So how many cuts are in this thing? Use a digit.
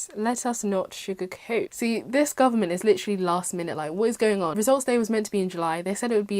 2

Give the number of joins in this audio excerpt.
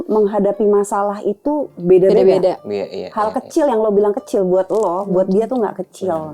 0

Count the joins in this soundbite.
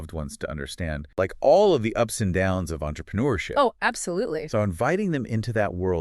1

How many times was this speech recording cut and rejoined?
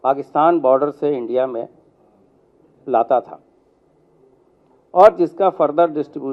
0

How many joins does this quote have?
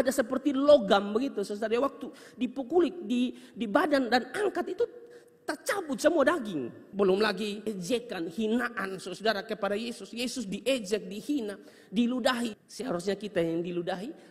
2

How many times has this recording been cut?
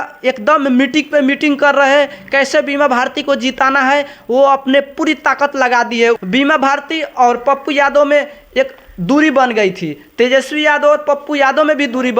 1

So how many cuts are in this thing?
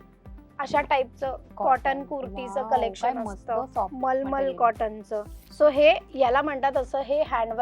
1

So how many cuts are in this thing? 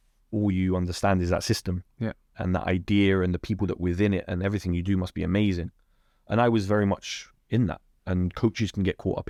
0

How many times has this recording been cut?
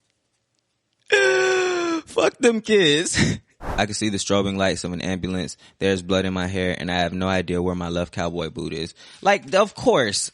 1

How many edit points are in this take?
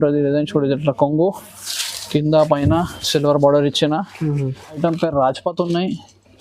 1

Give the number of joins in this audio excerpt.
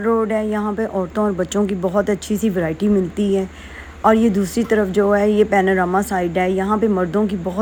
0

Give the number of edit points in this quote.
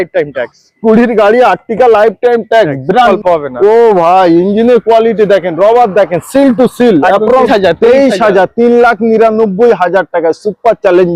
2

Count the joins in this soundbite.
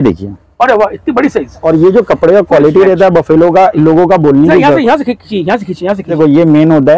2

